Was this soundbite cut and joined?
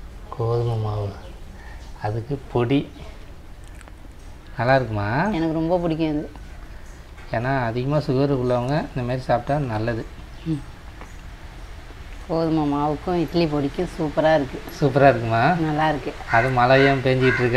no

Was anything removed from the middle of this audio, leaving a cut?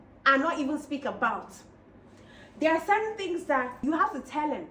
yes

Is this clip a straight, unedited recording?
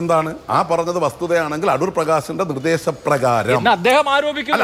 yes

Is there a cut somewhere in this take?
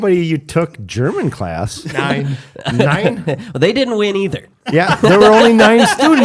yes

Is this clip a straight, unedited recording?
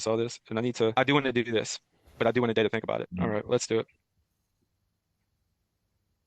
no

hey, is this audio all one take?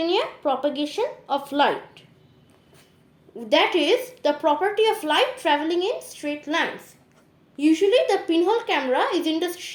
yes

